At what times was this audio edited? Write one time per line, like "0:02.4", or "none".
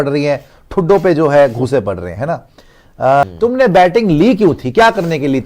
0:03.2